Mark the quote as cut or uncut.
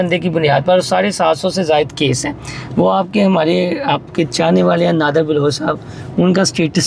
uncut